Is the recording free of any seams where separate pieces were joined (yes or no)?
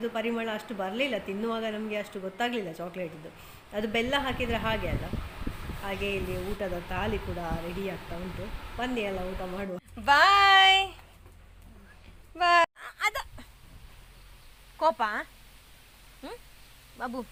yes